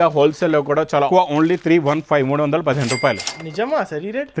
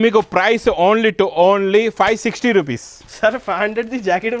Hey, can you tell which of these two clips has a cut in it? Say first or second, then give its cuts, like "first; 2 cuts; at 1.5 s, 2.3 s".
first; 1 cut; at 1.1 s